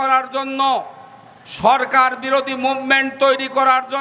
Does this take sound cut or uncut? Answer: uncut